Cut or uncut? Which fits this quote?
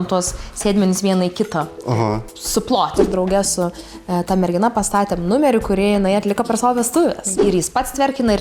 cut